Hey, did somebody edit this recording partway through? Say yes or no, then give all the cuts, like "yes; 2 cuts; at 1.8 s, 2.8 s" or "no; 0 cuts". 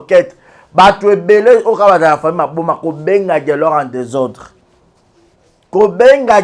no; 0 cuts